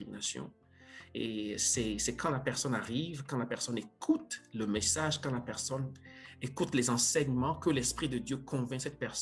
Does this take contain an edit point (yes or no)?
no